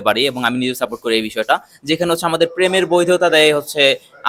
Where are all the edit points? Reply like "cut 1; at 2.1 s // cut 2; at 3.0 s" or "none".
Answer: none